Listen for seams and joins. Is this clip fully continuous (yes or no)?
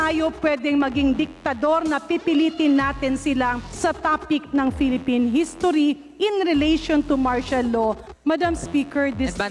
no